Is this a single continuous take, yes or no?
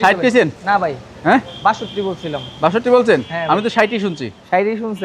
yes